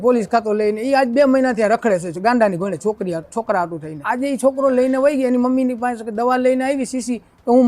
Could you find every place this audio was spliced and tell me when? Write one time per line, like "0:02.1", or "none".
0:03.9